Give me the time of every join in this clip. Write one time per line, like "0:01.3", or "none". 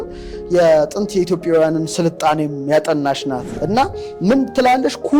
0:03.5